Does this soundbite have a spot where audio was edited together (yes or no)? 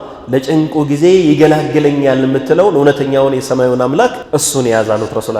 yes